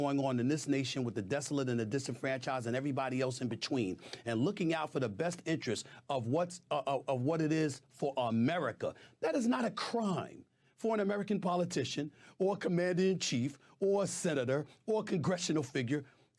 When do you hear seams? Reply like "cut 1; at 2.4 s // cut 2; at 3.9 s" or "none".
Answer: cut 1; at 12.6 s